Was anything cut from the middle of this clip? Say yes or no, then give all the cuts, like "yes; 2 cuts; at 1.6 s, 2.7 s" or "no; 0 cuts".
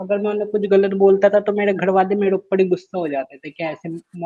no; 0 cuts